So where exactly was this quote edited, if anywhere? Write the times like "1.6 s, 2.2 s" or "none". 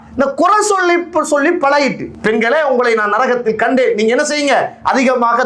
2.1 s